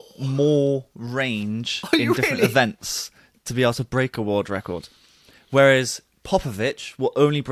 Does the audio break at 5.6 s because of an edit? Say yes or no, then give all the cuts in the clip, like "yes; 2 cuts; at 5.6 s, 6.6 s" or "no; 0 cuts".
no; 0 cuts